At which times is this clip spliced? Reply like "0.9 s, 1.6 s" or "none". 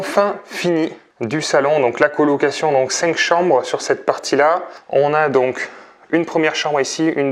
none